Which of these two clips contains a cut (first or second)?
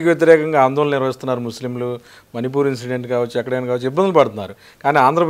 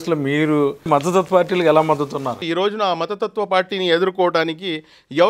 second